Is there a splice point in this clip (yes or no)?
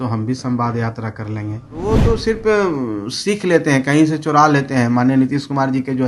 yes